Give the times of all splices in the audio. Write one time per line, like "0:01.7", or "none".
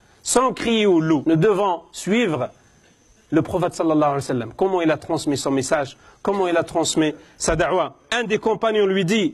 0:01.2
0:08.1